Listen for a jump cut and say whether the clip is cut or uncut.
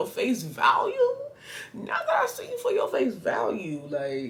uncut